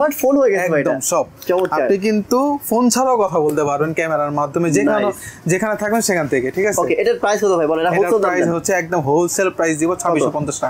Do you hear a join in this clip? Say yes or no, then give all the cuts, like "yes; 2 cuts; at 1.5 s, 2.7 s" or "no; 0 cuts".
no; 0 cuts